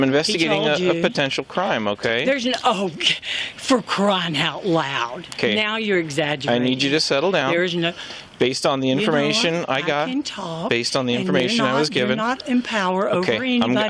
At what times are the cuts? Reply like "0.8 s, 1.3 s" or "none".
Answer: none

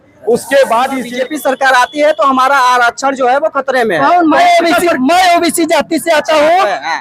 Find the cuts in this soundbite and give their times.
1.1 s

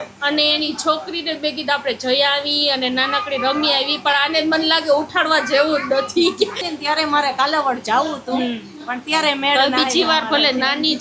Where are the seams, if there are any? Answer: 6.7 s

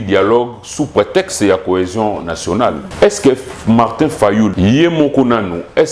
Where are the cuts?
2.8 s, 4.5 s

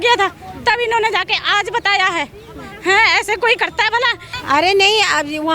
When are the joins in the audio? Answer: 4.3 s

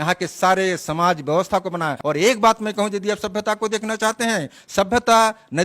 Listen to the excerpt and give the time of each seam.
2.0 s

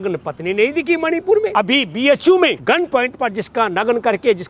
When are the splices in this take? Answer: 1.5 s, 2.6 s

